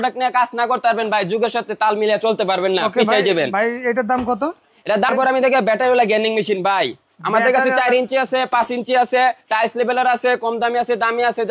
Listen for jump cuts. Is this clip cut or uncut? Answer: cut